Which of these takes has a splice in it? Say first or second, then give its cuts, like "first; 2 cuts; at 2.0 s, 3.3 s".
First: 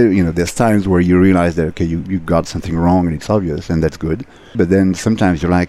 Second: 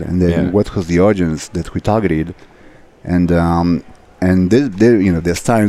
first; 1 cut; at 4.6 s